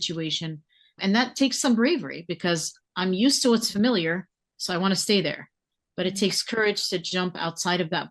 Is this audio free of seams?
yes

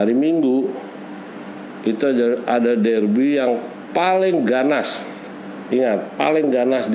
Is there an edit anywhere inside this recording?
no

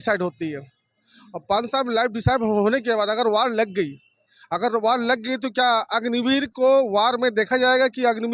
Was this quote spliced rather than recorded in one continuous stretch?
no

